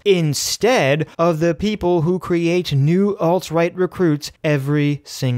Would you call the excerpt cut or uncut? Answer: cut